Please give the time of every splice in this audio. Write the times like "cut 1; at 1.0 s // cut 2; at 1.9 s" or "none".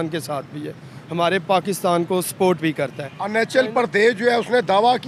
none